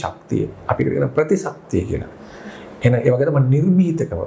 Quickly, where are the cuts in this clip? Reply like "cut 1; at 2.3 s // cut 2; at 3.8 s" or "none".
none